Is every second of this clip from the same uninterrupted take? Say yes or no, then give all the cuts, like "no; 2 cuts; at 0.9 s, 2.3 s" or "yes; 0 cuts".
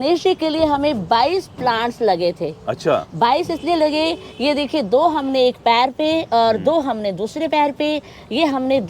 yes; 0 cuts